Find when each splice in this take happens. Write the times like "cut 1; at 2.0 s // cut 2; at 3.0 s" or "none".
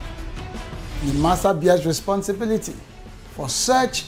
none